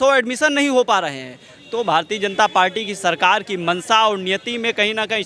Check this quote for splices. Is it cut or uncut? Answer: uncut